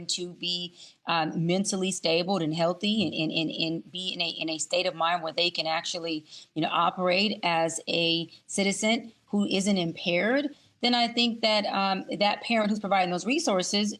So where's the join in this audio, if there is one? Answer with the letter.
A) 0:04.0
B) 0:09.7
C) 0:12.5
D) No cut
D